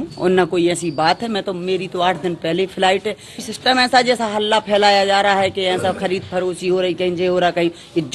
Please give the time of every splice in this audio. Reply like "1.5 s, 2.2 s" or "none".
3.4 s